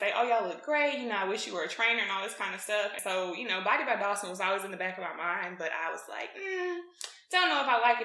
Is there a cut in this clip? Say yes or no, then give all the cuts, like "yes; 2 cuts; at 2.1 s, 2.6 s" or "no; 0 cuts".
yes; 1 cut; at 3.0 s